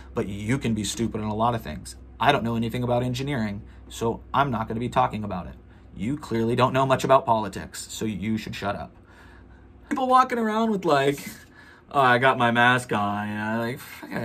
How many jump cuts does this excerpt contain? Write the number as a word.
one